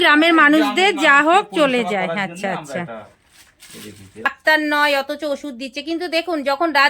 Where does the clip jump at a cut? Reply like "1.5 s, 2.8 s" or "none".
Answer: 4.2 s